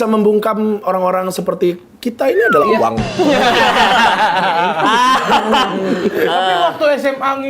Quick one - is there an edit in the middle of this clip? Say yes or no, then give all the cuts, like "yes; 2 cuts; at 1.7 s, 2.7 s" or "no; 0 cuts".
no; 0 cuts